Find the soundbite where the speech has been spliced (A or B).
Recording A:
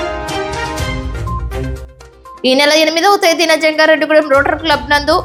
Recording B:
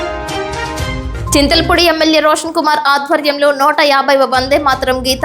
B